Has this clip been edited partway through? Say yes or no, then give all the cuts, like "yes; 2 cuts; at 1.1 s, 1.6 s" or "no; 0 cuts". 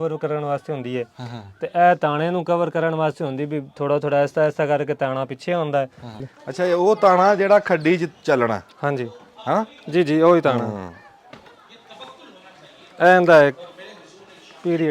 yes; 2 cuts; at 6.2 s, 11.5 s